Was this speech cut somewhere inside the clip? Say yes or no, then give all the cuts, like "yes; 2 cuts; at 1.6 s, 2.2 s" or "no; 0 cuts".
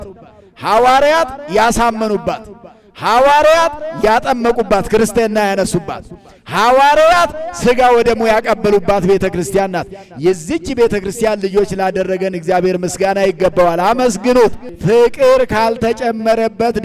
yes; 1 cut; at 14.7 s